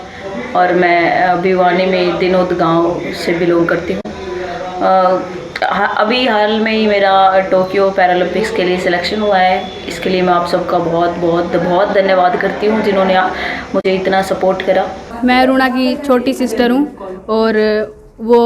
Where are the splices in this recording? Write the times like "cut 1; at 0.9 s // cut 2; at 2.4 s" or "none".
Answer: cut 1; at 15.0 s

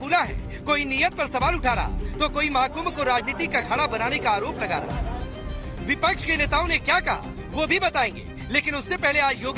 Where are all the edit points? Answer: cut 1; at 2.8 s

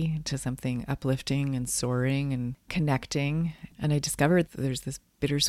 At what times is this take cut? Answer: cut 1; at 3.7 s

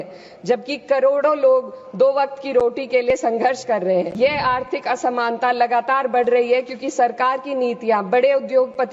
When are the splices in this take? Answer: cut 1; at 4.1 s

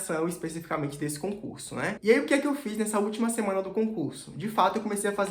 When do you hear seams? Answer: cut 1; at 2.0 s

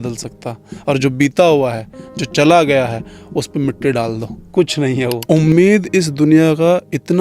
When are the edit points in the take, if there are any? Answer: cut 1; at 5.2 s

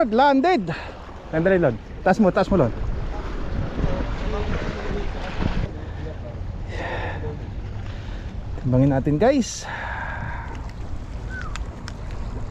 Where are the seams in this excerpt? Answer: cut 1; at 5.7 s

